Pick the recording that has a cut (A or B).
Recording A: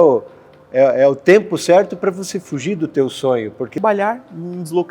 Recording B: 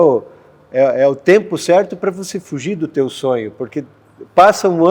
A